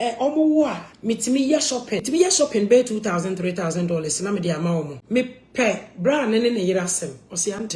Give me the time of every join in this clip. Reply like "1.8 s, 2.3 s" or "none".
0.9 s, 2.1 s, 5.0 s